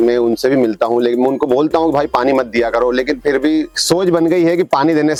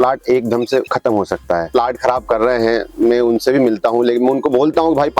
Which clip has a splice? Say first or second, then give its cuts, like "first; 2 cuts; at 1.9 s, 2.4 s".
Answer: second; 1 cut; at 1.7 s